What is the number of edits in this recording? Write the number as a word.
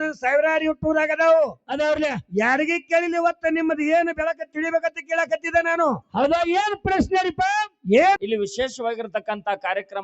one